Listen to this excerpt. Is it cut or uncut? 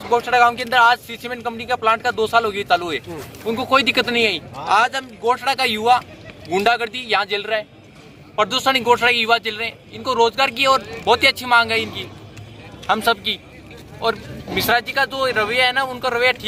uncut